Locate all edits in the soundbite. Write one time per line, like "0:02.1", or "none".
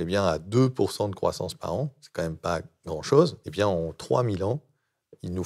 0:03.4